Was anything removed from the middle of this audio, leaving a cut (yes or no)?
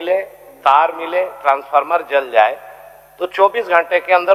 no